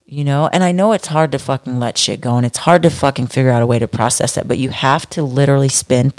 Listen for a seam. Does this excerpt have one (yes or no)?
no